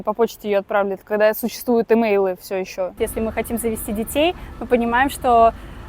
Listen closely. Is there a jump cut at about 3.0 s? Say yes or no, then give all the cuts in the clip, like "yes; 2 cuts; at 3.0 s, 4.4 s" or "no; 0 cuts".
yes; 1 cut; at 3.0 s